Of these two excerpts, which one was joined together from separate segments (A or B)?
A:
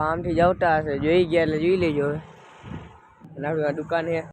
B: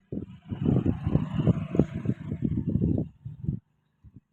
A